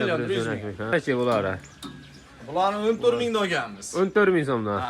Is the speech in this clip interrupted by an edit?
yes; 1 cut; at 0.9 s

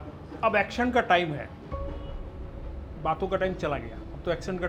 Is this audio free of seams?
yes; 0 cuts

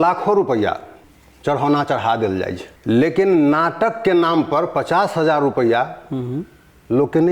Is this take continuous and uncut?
no; 2 cuts; at 1.0 s, 2.6 s

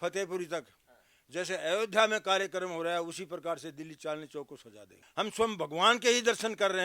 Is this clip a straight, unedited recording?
no; 1 cut; at 5.0 s

